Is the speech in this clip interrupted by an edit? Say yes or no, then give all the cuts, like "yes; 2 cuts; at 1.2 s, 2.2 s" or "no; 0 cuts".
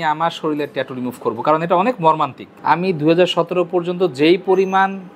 yes; 1 cut; at 2.5 s